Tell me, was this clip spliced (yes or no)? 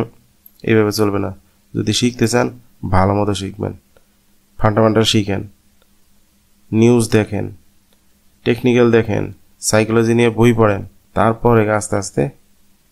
no